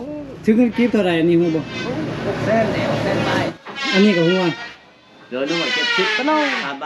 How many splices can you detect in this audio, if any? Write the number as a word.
one